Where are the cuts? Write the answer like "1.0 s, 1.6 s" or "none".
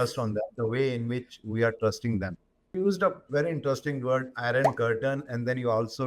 2.7 s